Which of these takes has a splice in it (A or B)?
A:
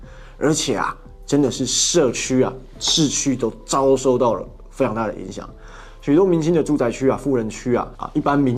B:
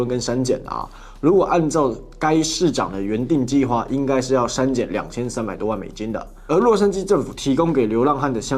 B